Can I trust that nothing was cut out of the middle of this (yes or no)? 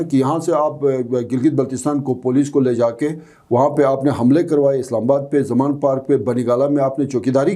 yes